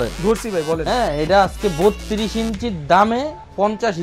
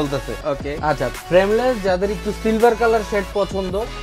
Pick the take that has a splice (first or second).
second